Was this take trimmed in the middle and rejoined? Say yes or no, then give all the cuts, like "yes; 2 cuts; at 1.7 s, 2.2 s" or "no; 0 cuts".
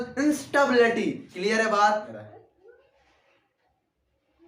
yes; 1 cut; at 2.2 s